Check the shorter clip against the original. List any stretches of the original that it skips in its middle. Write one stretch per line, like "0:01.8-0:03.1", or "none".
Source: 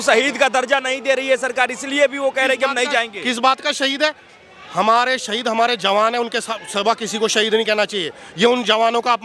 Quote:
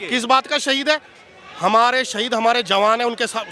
none